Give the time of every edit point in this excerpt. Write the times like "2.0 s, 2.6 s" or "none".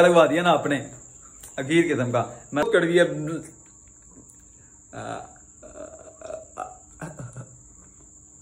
2.7 s